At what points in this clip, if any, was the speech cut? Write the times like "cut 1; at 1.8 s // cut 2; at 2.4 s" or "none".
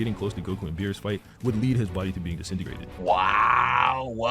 none